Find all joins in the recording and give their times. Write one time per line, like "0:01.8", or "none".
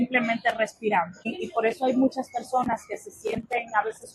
0:01.3